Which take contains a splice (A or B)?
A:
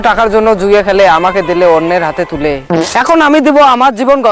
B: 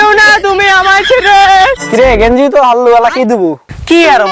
B